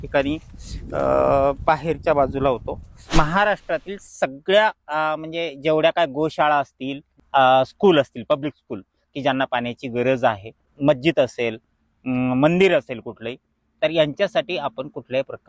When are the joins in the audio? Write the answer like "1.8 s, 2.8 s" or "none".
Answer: 3.1 s, 7.2 s, 10.7 s